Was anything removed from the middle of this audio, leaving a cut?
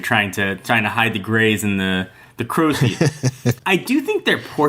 yes; 1 cut; at 3.6 s

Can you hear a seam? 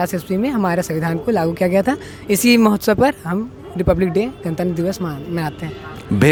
no; 0 cuts

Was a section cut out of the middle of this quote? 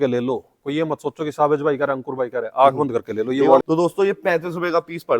yes; 1 cut; at 3.6 s

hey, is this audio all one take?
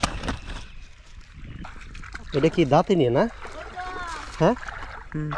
no; 1 cut; at 1.6 s

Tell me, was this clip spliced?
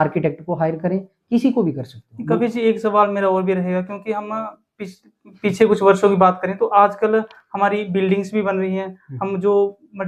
no; 0 cuts

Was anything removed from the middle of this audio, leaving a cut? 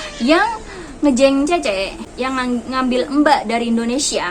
yes; 1 cut; at 2.0 s

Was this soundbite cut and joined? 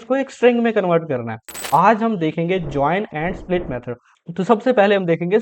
yes; 1 cut; at 1.5 s

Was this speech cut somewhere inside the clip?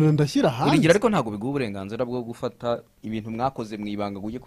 yes; 1 cut; at 2.9 s

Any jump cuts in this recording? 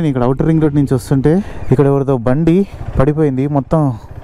yes; 2 cuts; at 1.6 s, 2.8 s

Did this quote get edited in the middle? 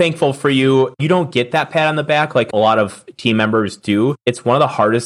yes; 3 cuts; at 1.0 s, 2.5 s, 4.2 s

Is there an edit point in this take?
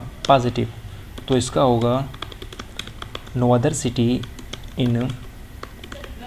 no; 0 cuts

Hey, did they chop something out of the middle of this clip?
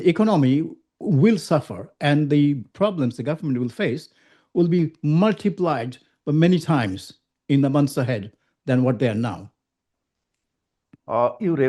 no; 0 cuts

